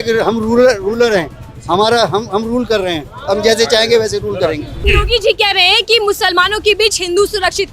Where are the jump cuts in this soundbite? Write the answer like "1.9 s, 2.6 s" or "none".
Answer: 4.8 s